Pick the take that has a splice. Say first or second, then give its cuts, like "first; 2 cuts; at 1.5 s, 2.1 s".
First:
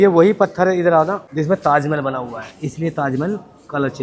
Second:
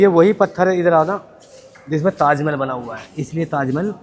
first; 1 cut; at 1.2 s